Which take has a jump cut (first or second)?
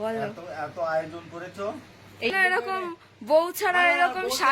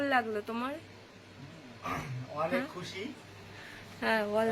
first